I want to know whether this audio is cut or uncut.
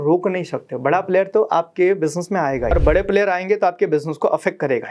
cut